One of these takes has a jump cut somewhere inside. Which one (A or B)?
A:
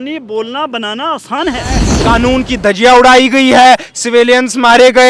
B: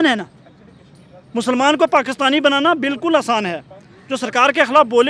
A